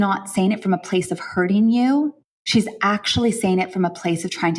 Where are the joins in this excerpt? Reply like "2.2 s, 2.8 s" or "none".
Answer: none